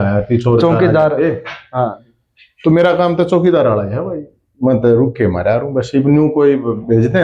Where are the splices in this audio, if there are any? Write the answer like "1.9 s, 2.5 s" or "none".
none

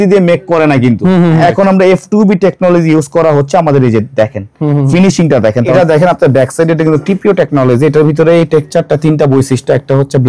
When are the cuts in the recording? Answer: 1.4 s, 5.7 s

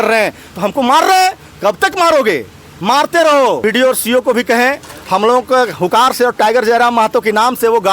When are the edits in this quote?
3.6 s

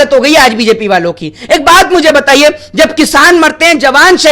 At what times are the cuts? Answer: none

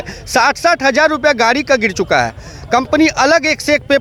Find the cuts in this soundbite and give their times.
none

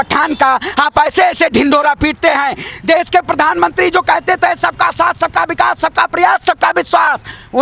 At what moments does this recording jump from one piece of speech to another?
none

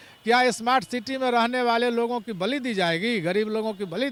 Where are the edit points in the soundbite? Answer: none

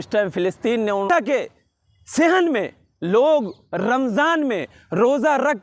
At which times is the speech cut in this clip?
1.1 s

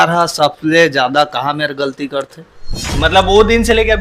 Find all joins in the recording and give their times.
2.8 s

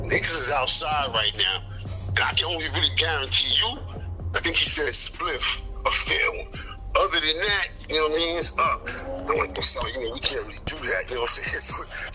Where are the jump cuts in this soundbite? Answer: none

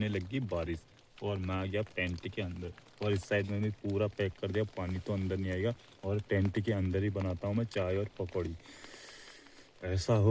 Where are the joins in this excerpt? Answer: none

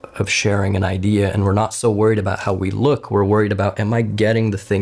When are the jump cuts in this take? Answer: none

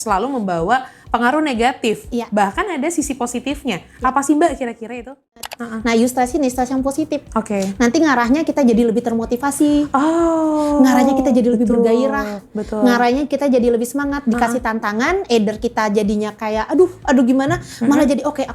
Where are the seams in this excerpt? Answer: 5.5 s

